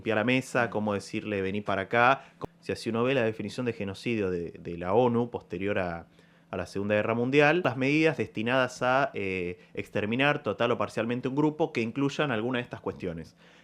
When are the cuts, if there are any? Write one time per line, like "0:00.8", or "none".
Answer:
0:02.3
0:07.6